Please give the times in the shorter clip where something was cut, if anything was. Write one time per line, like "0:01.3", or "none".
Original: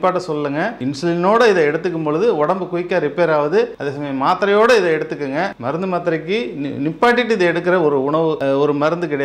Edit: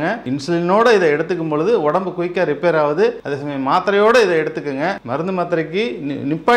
none